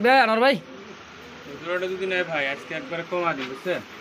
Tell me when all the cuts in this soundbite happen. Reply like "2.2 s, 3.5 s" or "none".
none